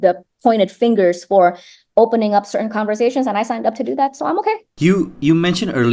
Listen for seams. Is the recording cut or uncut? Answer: cut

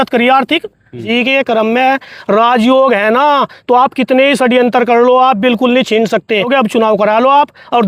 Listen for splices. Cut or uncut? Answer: cut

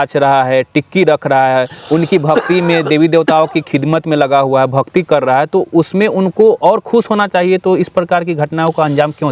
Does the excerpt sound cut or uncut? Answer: uncut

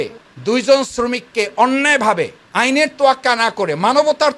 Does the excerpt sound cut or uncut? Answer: uncut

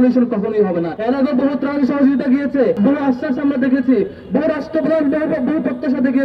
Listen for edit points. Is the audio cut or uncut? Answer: cut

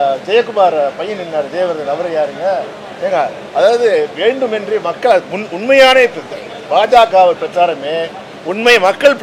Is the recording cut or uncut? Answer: uncut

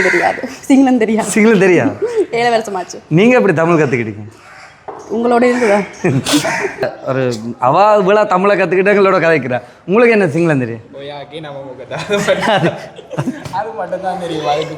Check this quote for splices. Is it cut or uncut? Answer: cut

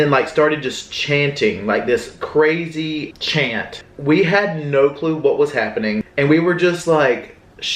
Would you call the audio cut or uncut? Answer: cut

